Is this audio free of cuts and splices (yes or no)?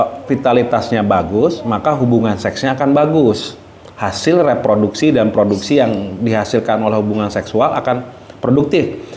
yes